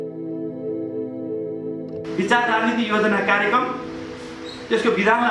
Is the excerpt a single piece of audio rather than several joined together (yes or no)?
no